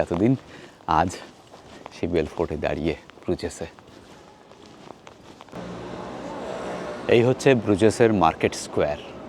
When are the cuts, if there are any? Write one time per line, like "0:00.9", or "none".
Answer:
none